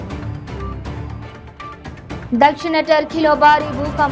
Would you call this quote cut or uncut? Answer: cut